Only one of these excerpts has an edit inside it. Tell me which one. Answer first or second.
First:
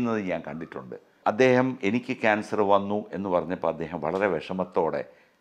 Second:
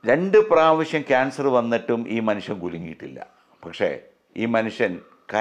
first